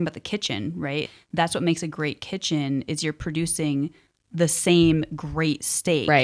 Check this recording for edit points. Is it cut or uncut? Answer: uncut